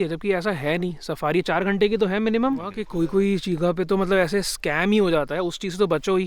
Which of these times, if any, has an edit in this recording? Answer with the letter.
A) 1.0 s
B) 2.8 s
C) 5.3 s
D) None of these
B